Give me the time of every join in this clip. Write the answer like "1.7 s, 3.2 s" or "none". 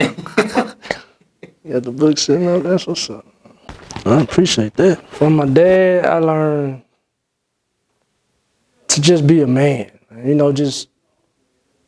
5.1 s